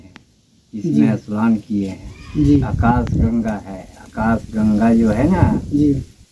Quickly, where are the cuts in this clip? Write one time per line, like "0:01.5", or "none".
0:02.7